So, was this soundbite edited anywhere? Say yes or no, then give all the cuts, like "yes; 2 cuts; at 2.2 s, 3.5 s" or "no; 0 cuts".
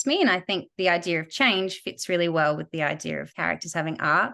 yes; 1 cut; at 3.3 s